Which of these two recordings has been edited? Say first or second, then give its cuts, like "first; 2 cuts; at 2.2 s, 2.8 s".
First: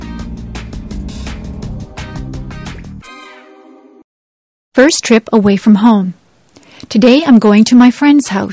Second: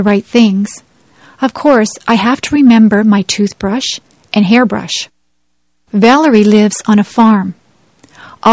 first; 1 cut; at 4.0 s